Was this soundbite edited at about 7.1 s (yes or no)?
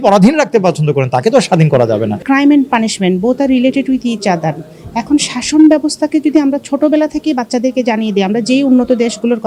no